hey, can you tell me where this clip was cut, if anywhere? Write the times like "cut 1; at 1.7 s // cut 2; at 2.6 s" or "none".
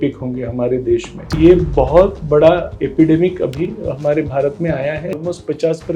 cut 1; at 1.3 s // cut 2; at 5.1 s